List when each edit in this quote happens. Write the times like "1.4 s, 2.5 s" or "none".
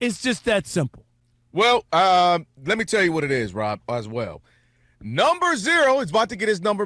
none